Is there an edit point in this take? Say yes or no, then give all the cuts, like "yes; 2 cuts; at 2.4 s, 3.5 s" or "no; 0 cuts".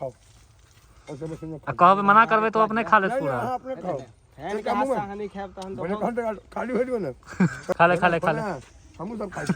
yes; 1 cut; at 7.7 s